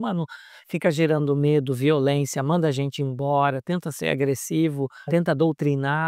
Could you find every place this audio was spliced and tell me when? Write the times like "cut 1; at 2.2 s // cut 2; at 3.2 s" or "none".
cut 1; at 5.1 s